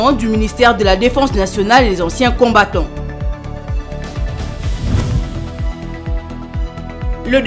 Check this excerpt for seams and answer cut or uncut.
uncut